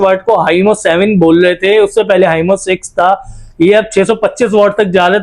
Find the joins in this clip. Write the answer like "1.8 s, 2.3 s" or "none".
none